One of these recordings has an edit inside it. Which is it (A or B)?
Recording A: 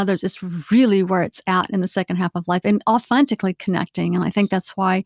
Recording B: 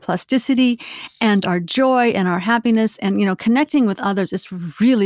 A